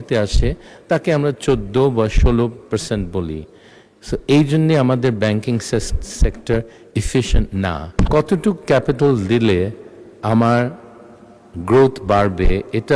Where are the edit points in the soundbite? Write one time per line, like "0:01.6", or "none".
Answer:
0:07.8